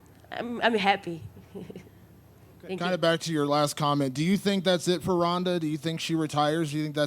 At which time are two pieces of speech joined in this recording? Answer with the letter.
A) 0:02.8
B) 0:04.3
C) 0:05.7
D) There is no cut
A